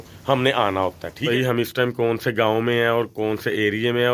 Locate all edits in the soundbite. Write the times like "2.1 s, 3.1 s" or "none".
1.2 s